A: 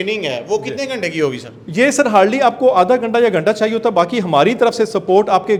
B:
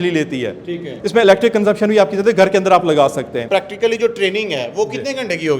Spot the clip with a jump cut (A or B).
B